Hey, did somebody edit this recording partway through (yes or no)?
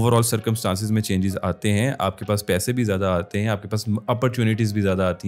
no